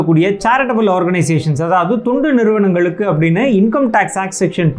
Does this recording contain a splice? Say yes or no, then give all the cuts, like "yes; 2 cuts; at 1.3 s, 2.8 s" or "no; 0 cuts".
no; 0 cuts